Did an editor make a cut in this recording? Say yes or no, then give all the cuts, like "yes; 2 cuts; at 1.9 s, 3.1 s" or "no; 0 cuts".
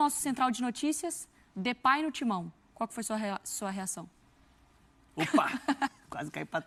no; 0 cuts